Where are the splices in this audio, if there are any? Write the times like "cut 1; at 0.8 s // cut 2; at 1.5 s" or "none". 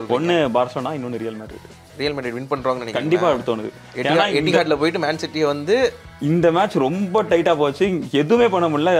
none